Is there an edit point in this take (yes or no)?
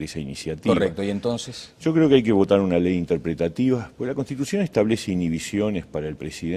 no